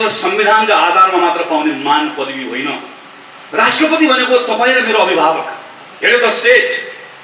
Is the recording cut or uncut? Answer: uncut